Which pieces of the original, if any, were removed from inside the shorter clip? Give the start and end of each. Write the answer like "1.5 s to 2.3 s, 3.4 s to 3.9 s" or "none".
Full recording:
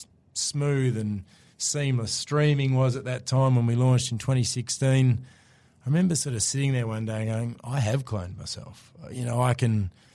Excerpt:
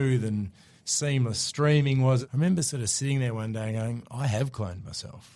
3.0 s to 5.8 s